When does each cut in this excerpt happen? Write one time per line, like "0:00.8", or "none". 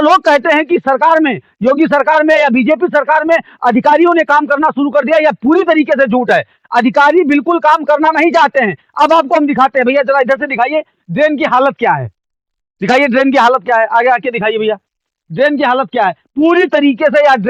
none